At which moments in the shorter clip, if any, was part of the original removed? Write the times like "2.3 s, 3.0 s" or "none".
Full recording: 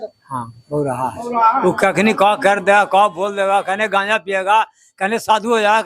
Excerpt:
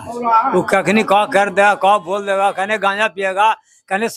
none